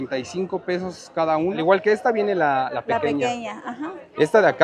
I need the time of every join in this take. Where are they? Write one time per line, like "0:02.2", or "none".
0:01.6